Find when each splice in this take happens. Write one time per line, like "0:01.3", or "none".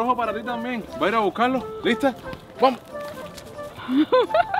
none